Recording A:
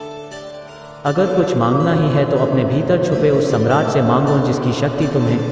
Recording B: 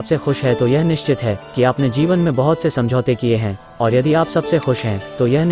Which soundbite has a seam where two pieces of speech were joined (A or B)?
A